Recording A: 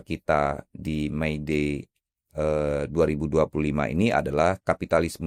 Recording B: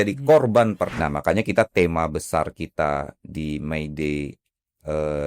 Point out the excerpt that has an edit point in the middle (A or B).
B